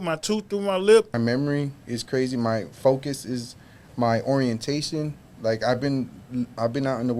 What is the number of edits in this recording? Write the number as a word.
one